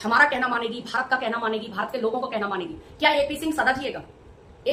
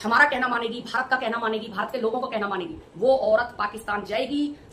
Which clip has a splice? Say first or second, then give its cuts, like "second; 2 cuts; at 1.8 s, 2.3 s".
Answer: second; 1 cut; at 2.8 s